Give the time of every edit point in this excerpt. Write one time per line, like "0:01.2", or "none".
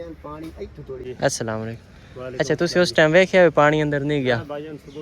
0:01.0